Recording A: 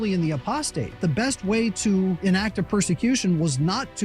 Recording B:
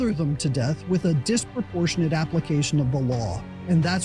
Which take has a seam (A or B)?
A